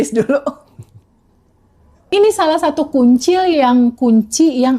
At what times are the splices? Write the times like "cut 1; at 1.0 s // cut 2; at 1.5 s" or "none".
cut 1; at 2.1 s